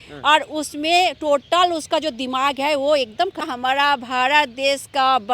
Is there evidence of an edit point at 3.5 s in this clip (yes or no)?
yes